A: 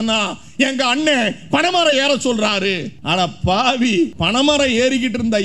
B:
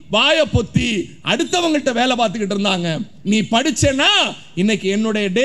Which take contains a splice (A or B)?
A